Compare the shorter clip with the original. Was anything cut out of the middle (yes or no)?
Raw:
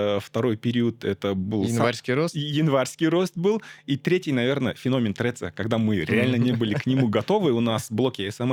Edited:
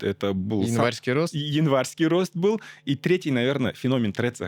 no